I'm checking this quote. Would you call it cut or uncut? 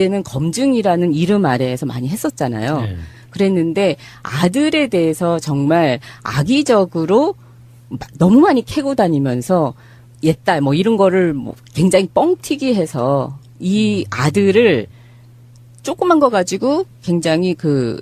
uncut